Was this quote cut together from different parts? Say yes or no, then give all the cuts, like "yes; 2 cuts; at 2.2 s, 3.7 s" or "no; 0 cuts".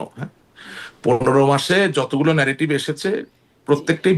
no; 0 cuts